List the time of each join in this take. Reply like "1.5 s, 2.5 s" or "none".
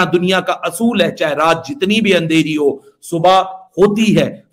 none